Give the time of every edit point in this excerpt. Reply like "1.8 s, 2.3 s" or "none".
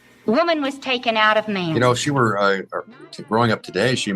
1.7 s